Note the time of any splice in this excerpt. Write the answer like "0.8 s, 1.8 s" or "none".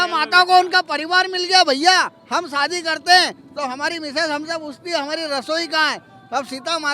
none